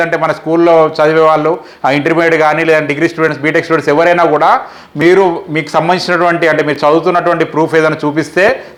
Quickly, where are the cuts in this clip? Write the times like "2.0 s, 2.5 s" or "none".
none